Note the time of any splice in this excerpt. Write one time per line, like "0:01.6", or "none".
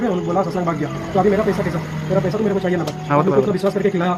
none

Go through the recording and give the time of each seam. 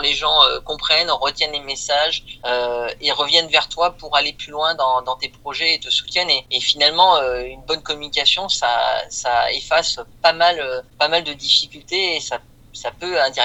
none

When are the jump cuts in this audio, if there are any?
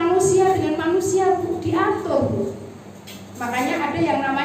none

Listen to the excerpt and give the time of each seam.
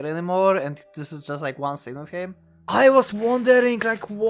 0:02.5

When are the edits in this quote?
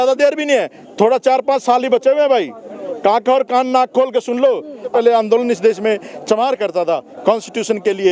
0:04.9

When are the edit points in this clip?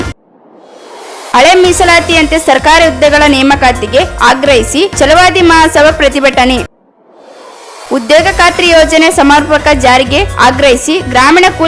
none

